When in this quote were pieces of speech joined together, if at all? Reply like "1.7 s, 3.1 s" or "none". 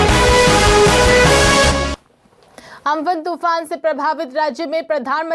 1.9 s

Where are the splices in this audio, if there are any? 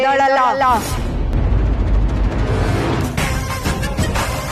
none

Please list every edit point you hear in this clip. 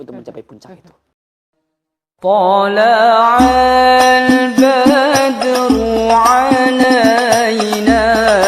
1.1 s

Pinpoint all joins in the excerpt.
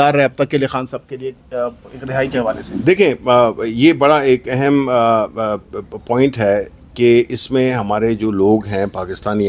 none

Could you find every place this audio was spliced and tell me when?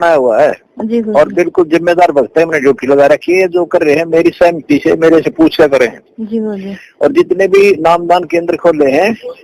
none

